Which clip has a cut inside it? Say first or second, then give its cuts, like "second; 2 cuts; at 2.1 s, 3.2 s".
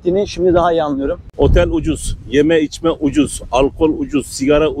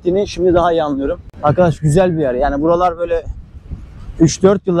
first; 1 cut; at 1.2 s